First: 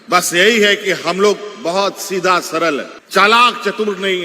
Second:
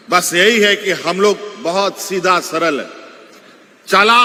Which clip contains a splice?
first; 1 cut; at 3.0 s

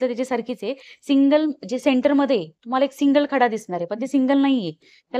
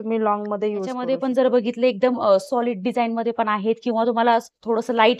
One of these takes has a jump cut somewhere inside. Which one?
second; 1 cut; at 1.0 s

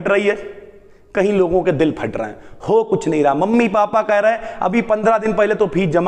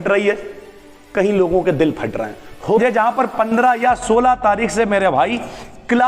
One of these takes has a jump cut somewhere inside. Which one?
second; 1 cut; at 2.8 s

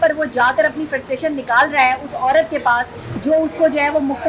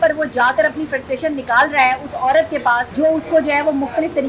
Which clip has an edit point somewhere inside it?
second; 1 cut; at 2.9 s

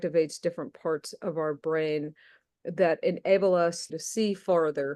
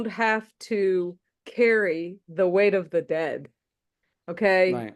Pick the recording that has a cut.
first; 1 cut; at 3.9 s

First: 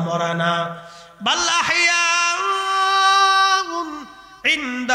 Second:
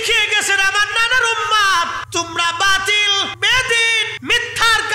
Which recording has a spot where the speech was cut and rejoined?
second; 3 cuts; at 2.0 s, 3.4 s, 4.1 s

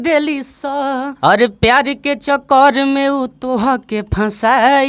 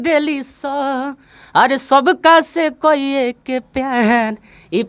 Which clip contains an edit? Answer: first; 1 cut; at 1.1 s

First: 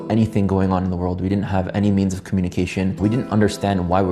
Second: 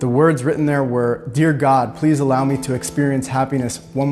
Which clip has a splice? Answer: first; 1 cut; at 2.9 s

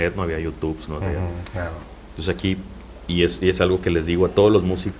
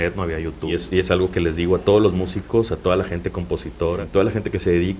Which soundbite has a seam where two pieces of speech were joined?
second; 2 cuts; at 0.7 s, 4.0 s

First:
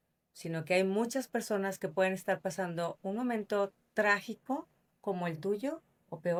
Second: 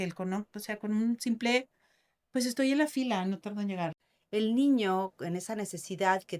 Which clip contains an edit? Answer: second; 1 cut; at 4.1 s

